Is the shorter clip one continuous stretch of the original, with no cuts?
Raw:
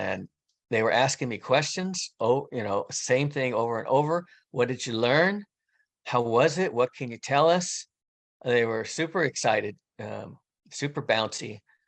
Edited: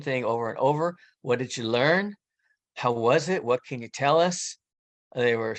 yes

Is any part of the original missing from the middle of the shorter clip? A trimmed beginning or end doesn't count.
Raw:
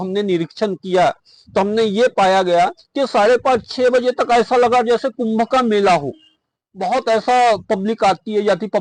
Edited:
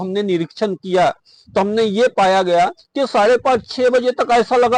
no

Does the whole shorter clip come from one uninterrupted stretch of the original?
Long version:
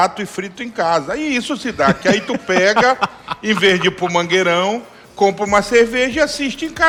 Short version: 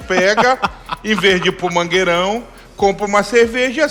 yes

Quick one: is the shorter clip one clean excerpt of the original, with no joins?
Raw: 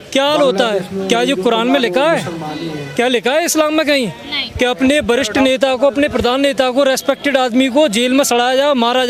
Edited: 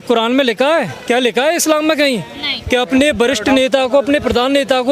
no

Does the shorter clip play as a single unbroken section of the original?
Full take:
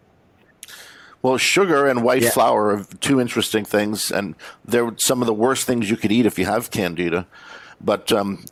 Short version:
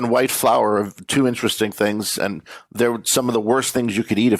yes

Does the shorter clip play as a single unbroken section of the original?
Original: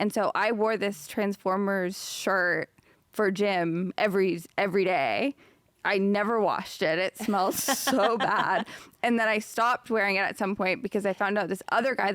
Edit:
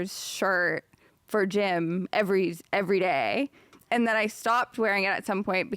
no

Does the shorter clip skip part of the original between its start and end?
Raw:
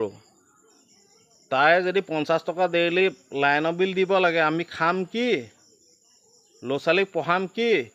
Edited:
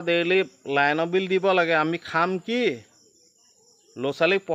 no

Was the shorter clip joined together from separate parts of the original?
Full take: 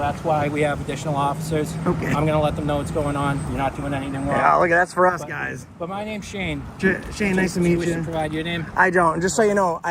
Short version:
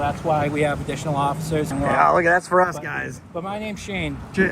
yes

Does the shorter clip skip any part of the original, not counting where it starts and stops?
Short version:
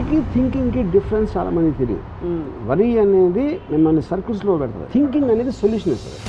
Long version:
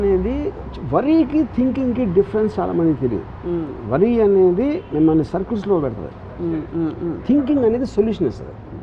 yes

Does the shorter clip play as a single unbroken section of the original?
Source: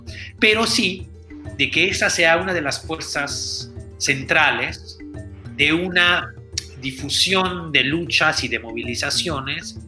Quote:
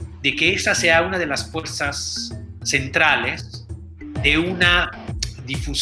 yes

